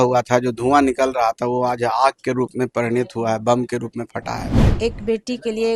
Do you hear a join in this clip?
yes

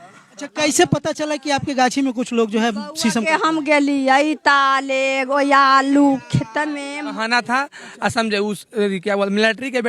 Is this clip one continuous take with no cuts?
no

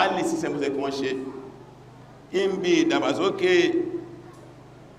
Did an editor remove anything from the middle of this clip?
no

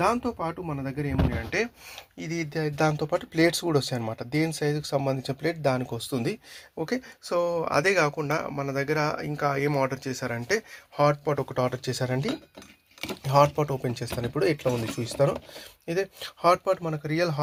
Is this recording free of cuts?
yes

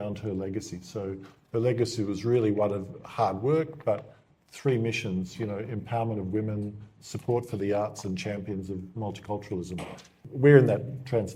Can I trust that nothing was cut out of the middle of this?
no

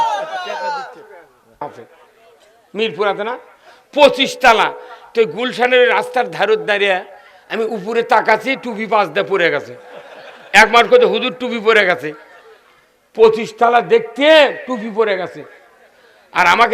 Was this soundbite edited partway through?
yes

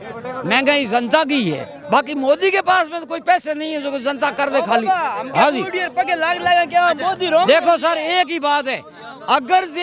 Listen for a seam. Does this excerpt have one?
no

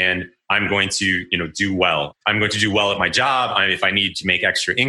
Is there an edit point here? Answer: yes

